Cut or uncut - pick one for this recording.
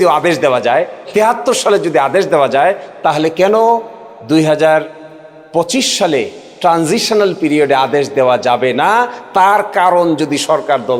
uncut